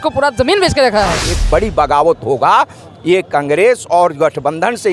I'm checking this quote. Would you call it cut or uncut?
cut